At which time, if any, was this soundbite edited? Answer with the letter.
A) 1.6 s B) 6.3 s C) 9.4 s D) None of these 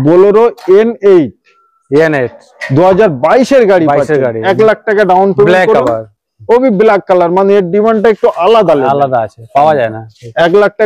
D